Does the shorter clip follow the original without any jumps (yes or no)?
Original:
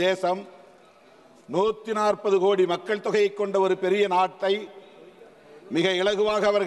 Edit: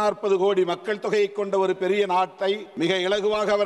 no